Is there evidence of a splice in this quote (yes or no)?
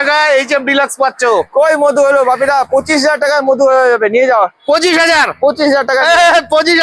no